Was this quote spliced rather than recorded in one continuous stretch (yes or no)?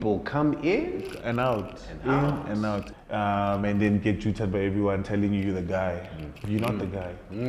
yes